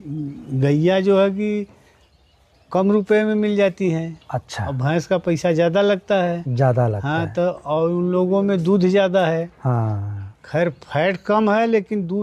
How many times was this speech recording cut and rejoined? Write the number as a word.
zero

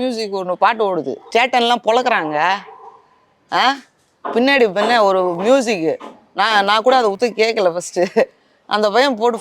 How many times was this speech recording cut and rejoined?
one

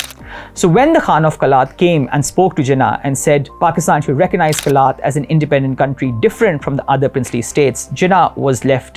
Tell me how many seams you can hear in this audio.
zero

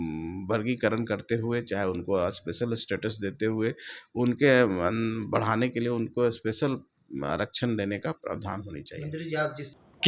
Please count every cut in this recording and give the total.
zero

